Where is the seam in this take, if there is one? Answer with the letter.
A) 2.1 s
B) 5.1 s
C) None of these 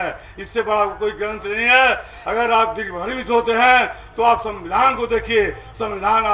C